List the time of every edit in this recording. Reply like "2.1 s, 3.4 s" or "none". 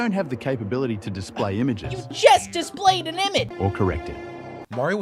3.5 s